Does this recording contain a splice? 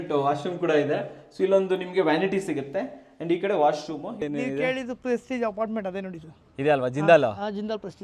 yes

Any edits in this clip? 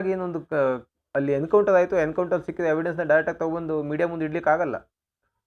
no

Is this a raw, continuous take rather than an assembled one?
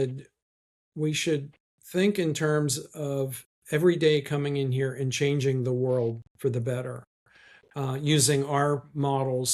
yes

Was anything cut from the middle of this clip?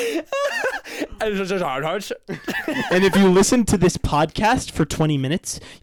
no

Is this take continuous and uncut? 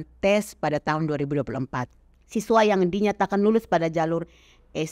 no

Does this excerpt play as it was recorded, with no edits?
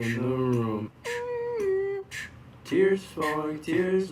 yes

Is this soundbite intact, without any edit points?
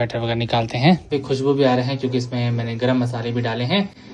no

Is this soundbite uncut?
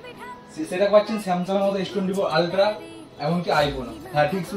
yes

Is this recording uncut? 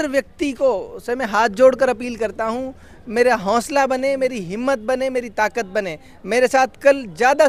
yes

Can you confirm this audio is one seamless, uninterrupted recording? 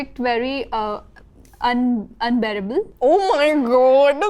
no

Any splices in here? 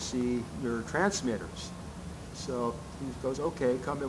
yes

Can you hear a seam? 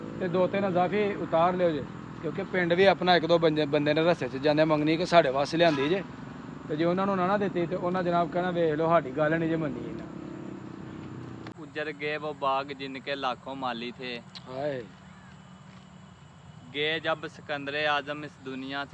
yes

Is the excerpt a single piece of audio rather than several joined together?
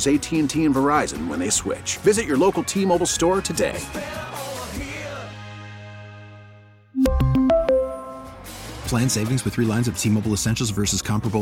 yes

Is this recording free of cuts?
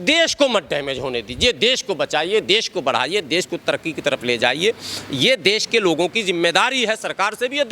yes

